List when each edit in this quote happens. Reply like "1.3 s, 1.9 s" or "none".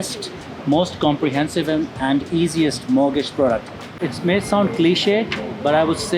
4.0 s